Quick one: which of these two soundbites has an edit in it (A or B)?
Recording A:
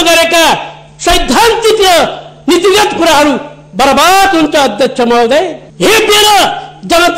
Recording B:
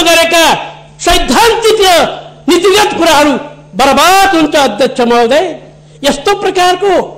A